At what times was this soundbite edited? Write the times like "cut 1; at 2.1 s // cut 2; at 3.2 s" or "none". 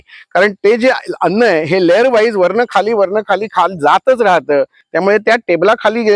cut 1; at 4.8 s